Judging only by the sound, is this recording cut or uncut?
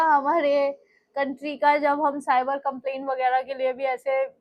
uncut